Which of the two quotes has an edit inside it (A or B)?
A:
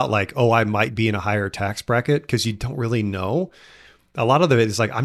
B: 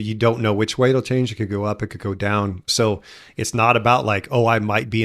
B